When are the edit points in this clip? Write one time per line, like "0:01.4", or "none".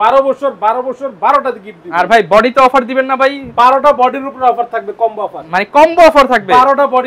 none